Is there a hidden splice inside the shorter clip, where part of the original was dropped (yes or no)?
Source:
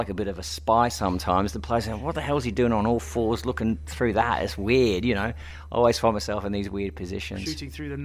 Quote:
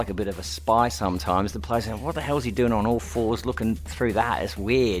no